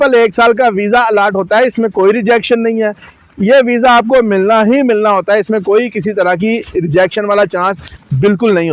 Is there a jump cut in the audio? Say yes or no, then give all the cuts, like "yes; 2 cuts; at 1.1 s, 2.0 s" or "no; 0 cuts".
no; 0 cuts